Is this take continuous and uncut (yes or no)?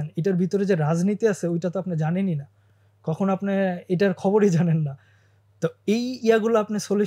yes